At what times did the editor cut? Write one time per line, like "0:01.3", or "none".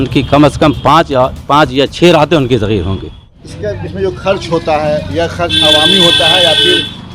0:03.4